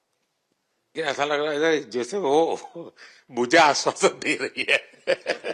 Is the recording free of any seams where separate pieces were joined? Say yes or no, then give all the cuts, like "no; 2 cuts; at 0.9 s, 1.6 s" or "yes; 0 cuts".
no; 1 cut; at 0.9 s